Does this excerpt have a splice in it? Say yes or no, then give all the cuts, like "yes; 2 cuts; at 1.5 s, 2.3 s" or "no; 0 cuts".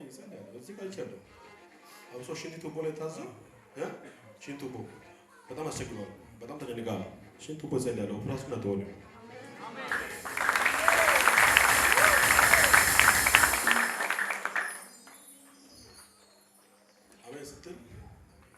no; 0 cuts